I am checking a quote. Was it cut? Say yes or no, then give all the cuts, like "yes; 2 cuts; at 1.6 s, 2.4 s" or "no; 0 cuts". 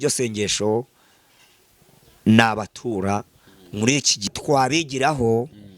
yes; 1 cut; at 4.3 s